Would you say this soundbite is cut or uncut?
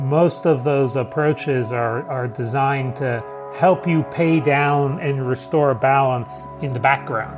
cut